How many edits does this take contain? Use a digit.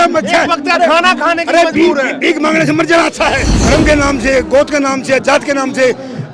1